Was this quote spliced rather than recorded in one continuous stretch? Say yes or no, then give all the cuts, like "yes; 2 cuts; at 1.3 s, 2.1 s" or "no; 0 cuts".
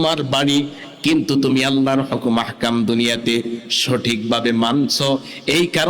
no; 0 cuts